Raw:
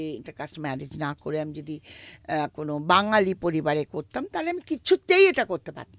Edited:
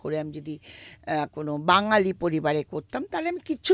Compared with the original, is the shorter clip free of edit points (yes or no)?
yes